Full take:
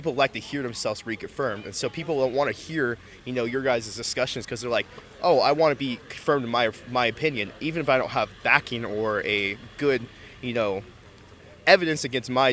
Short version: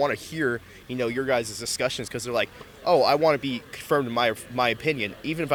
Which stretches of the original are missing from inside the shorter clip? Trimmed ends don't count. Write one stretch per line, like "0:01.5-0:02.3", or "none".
none